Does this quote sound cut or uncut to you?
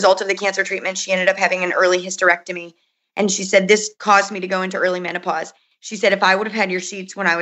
cut